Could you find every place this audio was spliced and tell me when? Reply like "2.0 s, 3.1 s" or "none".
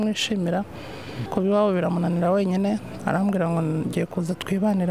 1.2 s